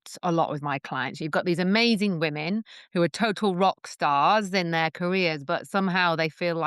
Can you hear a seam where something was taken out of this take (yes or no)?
yes